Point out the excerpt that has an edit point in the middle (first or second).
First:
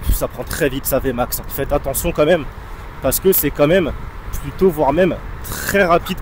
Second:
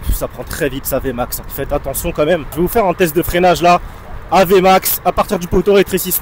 second